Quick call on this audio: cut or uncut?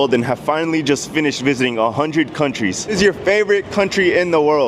cut